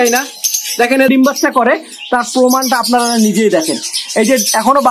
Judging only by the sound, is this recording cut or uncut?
cut